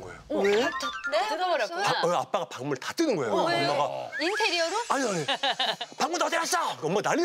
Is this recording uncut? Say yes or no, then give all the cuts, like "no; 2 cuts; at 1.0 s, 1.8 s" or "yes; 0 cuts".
yes; 0 cuts